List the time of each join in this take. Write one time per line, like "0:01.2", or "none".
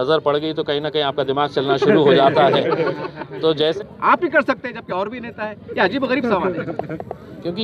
0:03.7